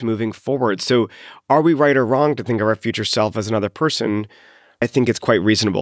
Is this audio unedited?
no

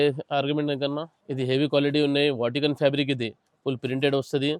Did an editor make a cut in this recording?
yes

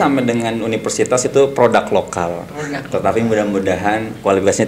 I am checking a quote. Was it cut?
no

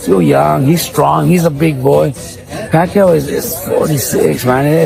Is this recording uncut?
yes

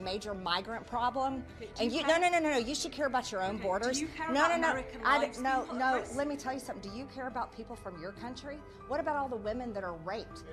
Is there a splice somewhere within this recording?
no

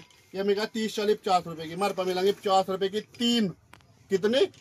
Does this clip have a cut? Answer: no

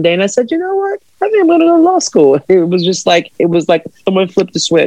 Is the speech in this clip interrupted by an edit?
yes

